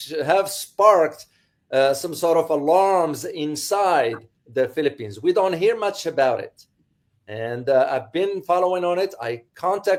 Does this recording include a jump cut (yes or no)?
no